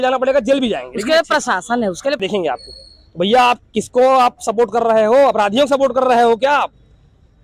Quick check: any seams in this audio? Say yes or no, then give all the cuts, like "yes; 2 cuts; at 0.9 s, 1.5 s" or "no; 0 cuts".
yes; 1 cut; at 2.2 s